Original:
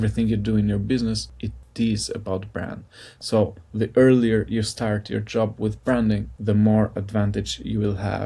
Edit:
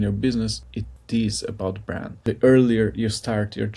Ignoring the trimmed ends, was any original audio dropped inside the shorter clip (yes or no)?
yes